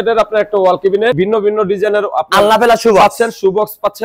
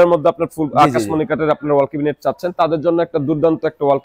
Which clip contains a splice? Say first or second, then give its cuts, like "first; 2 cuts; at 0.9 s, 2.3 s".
first; 1 cut; at 1.2 s